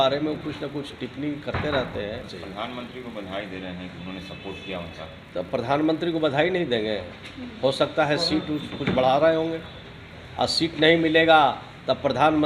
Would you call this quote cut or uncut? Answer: cut